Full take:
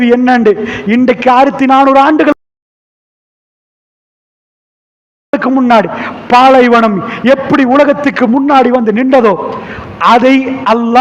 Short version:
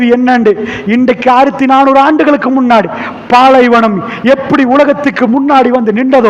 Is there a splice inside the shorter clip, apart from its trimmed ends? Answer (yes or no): yes